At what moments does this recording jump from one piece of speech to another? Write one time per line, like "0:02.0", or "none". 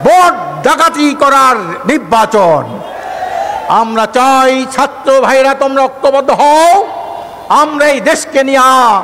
none